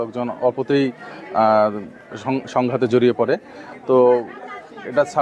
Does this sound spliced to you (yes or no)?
no